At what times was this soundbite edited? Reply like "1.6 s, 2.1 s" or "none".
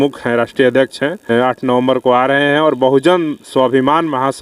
1.3 s